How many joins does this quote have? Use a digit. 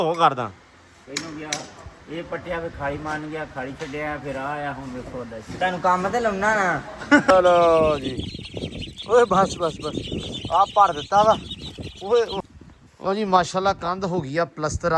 2